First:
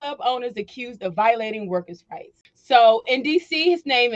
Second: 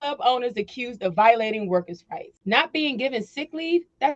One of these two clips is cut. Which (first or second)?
second